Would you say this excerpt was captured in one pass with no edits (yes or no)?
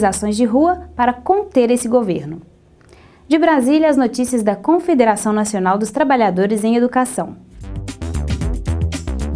no